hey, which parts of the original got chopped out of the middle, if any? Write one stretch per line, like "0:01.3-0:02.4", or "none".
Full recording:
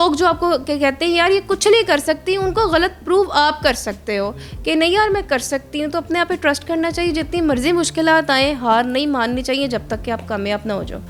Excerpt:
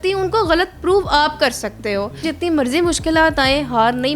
0:04.5-0:07.2